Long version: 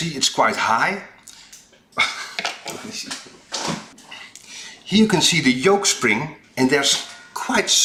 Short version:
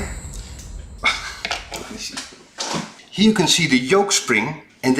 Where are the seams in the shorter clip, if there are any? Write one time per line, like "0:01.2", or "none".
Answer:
0:03.0